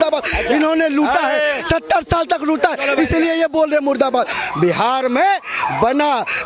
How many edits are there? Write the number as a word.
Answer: one